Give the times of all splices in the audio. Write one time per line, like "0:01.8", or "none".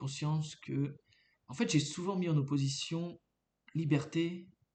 none